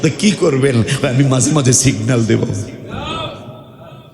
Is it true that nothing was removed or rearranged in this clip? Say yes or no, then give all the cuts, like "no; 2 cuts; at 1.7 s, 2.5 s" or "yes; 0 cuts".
yes; 0 cuts